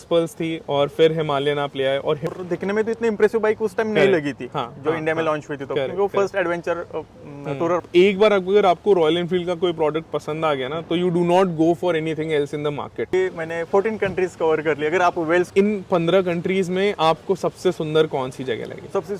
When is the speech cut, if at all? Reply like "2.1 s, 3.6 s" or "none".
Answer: 2.3 s, 7.8 s, 13.1 s, 15.5 s